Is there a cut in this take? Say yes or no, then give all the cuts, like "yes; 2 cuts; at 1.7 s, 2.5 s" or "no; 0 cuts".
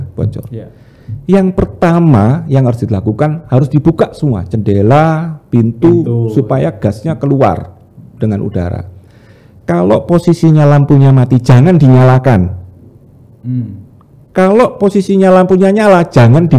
no; 0 cuts